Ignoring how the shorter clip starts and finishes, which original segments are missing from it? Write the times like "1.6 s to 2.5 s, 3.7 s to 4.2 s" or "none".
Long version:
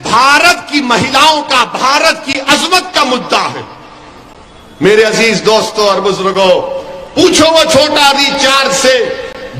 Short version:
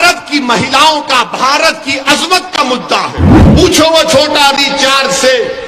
3.8 s to 7.0 s